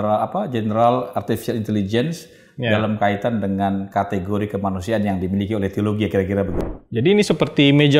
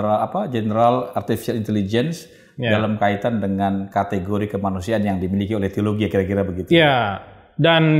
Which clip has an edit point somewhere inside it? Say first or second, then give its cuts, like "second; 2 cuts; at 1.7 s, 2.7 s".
first; 1 cut; at 6.6 s